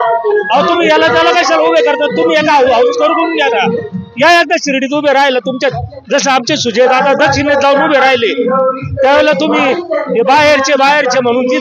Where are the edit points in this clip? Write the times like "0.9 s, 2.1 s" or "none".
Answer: none